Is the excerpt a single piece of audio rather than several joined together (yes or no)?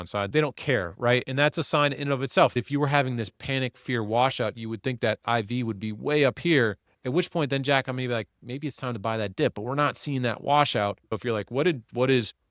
no